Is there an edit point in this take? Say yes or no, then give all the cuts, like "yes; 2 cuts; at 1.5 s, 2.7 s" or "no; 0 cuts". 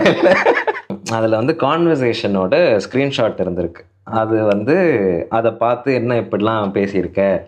yes; 1 cut; at 1.0 s